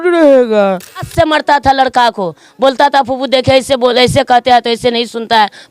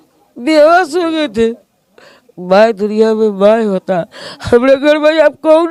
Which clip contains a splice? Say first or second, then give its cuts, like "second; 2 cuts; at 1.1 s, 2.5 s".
first; 1 cut; at 1.1 s